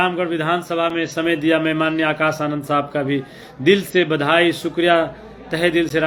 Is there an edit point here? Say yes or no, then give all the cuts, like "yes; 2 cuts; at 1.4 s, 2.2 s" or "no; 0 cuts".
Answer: no; 0 cuts